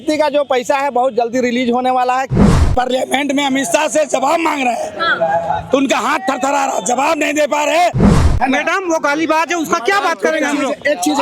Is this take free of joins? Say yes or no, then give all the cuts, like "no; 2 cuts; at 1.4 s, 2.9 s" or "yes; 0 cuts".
no; 2 cuts; at 2.5 s, 8.1 s